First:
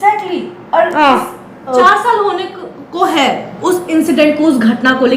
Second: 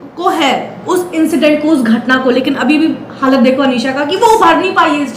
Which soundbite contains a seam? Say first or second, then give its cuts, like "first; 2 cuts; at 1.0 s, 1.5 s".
first; 1 cut; at 1.7 s